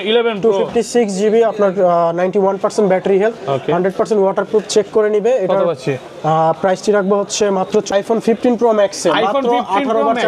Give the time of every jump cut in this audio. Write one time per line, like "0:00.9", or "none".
0:08.0